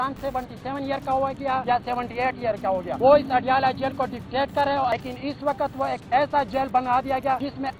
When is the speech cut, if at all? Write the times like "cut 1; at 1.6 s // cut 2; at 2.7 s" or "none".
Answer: cut 1; at 4.9 s